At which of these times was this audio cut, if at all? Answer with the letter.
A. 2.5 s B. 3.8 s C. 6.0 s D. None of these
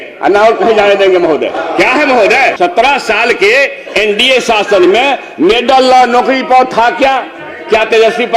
A